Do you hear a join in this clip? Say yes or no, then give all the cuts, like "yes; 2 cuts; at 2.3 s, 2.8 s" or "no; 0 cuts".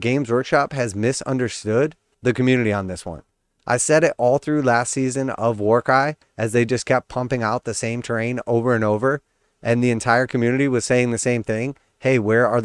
no; 0 cuts